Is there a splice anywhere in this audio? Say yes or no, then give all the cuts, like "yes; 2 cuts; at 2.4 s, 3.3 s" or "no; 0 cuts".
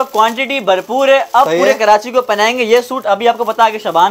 no; 0 cuts